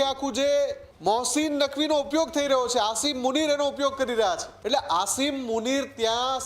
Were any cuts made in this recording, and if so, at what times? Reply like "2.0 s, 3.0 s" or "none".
0.9 s, 4.5 s